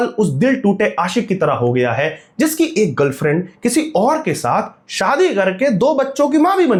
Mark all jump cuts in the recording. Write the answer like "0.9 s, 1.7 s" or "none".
none